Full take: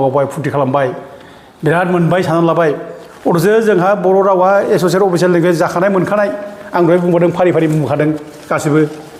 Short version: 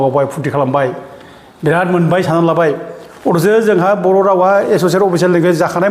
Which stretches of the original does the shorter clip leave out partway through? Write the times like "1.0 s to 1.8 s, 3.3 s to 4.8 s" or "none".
none